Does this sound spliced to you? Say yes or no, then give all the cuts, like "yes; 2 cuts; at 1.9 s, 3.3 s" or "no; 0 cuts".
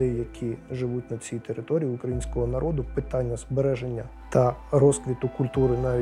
yes; 1 cut; at 4.1 s